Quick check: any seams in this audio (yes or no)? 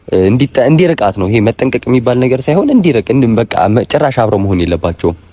no